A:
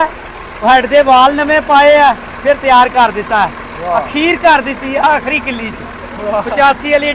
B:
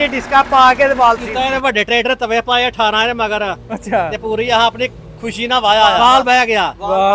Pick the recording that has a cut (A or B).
B